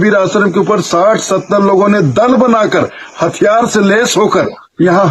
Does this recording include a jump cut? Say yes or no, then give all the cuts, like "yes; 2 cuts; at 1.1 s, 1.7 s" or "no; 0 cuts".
no; 0 cuts